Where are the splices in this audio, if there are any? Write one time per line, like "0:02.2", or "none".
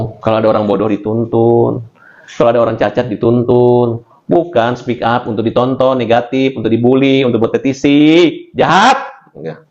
none